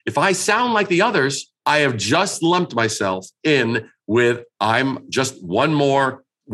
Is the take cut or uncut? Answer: cut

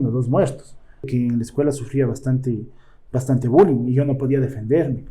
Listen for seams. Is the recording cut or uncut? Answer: cut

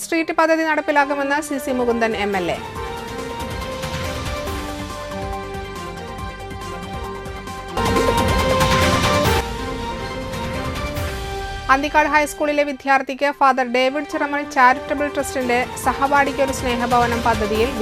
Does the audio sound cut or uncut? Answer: uncut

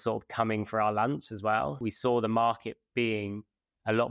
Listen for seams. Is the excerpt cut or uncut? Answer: cut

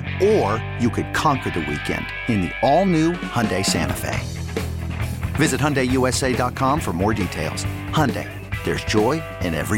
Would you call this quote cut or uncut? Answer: uncut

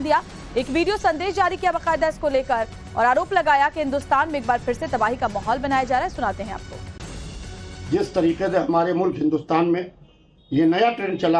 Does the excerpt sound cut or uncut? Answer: cut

